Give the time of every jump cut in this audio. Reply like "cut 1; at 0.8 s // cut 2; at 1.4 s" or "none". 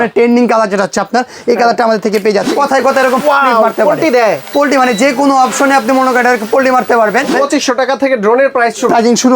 cut 1; at 2.5 s // cut 2; at 7.3 s